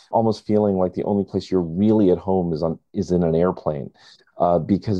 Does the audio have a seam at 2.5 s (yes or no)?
no